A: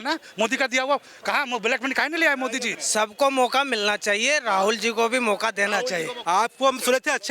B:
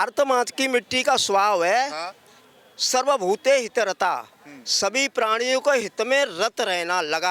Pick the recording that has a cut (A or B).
A